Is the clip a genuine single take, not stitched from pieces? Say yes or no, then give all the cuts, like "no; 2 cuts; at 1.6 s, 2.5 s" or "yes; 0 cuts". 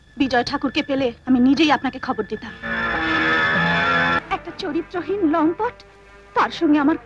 no; 1 cut; at 4.2 s